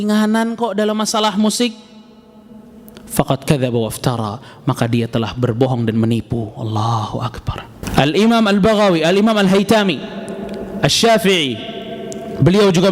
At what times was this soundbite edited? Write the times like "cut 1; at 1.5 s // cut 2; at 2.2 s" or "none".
cut 1; at 7.8 s